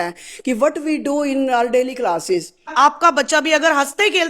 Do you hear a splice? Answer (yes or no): yes